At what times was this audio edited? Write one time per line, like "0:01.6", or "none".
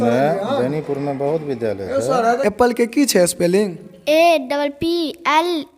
0:02.4